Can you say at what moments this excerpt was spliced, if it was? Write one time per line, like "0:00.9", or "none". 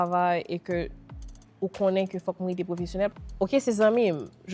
0:03.1